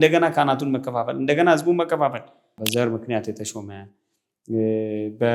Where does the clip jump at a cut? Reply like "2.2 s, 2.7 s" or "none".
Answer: 2.5 s